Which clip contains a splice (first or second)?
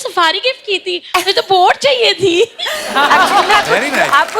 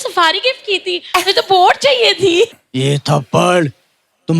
second